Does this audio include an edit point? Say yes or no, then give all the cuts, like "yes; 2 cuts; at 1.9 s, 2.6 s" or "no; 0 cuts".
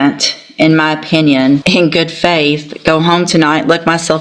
yes; 1 cut; at 1.6 s